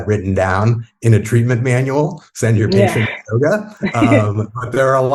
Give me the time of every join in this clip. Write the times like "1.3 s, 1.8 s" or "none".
none